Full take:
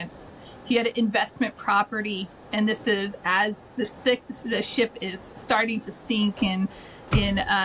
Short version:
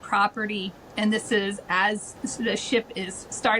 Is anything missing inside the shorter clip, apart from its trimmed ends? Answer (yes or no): yes